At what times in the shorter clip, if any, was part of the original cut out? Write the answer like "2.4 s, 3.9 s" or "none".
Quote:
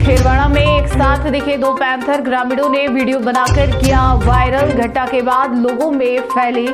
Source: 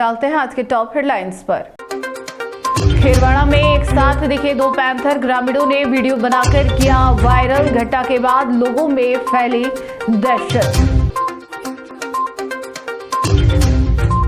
none